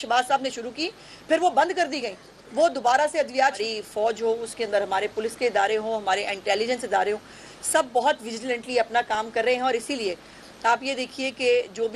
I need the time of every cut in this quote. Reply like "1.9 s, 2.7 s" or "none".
3.6 s